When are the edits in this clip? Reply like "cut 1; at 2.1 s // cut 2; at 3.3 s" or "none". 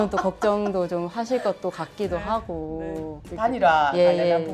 cut 1; at 3.3 s